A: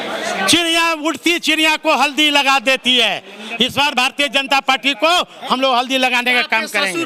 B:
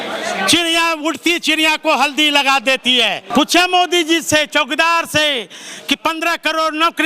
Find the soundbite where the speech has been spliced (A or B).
B